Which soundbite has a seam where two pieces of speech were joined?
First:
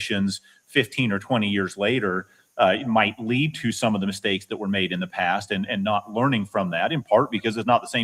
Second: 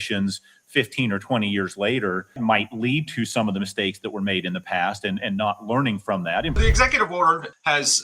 second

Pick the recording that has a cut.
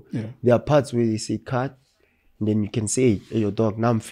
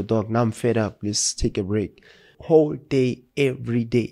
second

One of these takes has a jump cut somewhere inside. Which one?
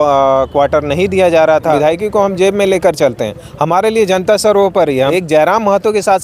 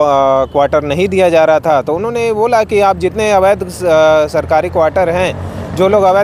first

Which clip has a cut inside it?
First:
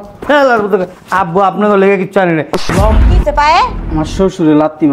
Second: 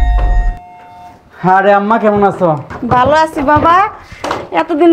first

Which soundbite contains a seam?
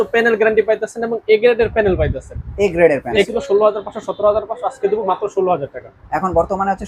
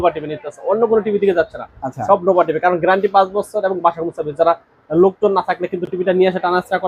first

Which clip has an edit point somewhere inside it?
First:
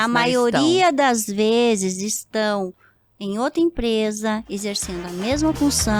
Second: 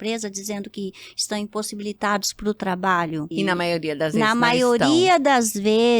second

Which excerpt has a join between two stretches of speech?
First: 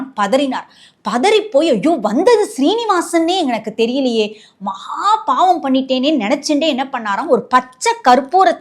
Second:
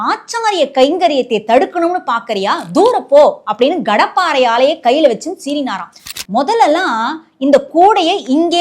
second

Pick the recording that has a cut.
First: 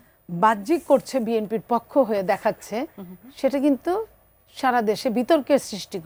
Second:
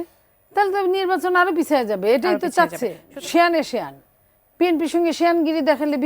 second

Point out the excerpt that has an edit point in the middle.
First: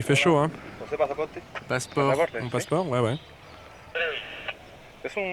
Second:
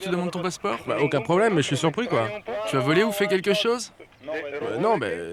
first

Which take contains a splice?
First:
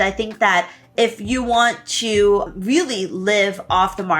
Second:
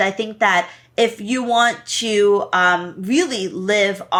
first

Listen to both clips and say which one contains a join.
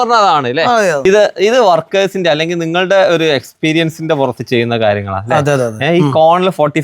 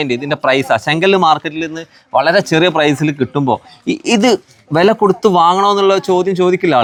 first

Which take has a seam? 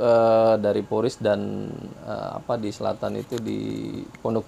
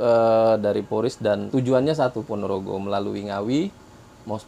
second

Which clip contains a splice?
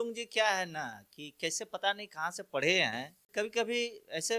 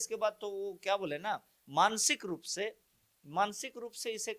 first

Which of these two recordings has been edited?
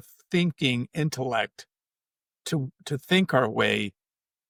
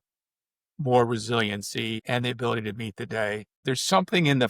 second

